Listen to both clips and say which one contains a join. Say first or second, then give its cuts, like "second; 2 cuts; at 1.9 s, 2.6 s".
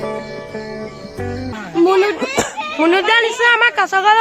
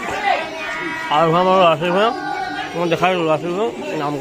first; 1 cut; at 1.5 s